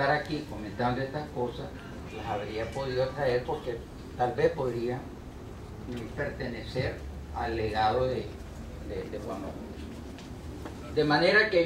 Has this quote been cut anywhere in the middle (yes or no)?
yes